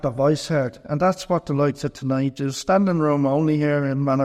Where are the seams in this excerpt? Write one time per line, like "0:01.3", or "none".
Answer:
none